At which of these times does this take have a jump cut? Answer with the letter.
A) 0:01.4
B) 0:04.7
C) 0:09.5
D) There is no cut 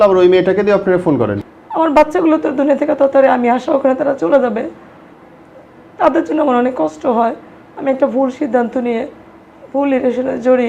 A